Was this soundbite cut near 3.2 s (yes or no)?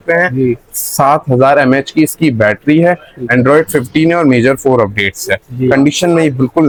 no